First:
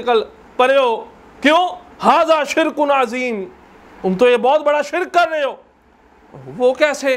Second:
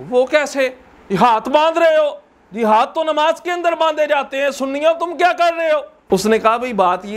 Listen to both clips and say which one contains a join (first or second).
second